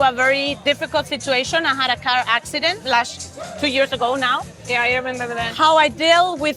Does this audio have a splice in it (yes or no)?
no